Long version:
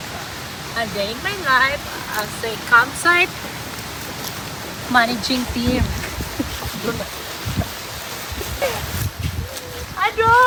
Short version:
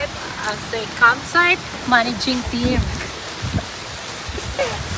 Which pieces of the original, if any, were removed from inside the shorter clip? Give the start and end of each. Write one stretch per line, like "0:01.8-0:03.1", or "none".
0:03.4-0:04.8
0:06.1-0:07.1